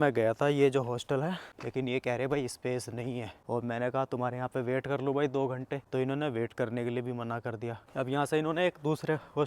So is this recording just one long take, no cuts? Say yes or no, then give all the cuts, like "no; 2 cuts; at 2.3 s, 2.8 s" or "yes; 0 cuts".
no; 2 cuts; at 3.3 s, 5.8 s